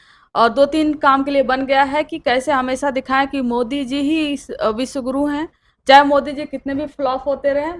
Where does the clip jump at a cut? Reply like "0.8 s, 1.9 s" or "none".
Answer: none